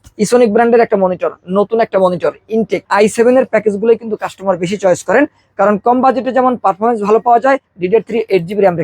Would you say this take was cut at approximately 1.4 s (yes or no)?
no